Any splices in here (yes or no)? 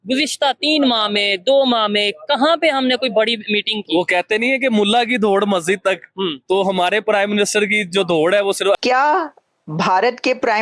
yes